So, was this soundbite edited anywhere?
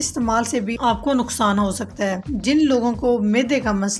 yes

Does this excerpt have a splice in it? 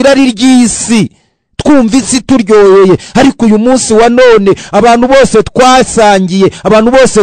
no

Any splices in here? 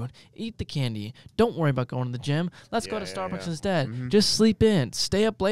no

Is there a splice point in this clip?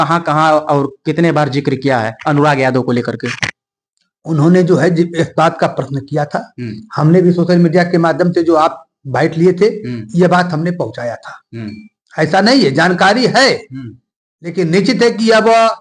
no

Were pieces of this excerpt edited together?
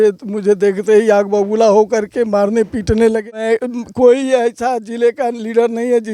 yes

